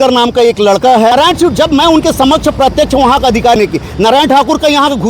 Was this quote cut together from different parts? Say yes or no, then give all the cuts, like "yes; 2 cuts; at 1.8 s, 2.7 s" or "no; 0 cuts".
yes; 2 cuts; at 1.1 s, 3.6 s